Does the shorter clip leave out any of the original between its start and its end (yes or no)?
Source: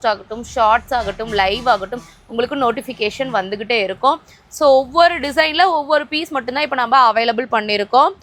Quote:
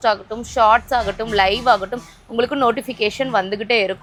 no